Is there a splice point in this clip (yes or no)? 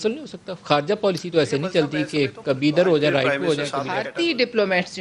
yes